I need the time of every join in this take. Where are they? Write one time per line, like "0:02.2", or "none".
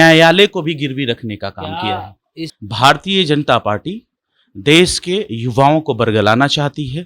0:02.5